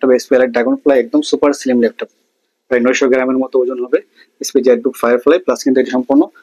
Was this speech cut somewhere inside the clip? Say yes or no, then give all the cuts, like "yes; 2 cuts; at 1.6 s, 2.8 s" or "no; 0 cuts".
no; 0 cuts